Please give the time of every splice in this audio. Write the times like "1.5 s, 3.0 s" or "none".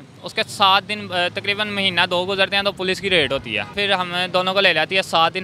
3.8 s

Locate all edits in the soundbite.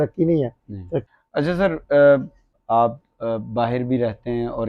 1.0 s, 2.5 s

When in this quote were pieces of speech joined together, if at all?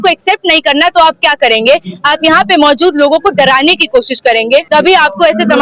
4.7 s

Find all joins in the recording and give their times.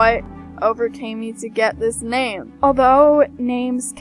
2.5 s

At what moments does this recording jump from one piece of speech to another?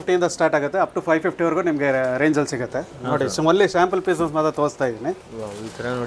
none

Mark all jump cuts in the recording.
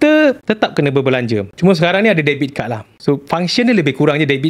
1.5 s

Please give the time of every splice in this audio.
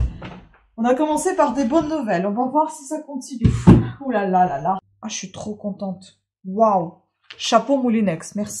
4.9 s

